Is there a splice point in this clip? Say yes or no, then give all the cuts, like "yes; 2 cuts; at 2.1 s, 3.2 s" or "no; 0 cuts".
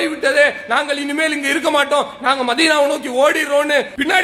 no; 0 cuts